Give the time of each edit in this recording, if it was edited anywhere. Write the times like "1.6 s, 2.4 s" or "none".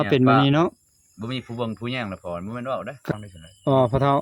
3.2 s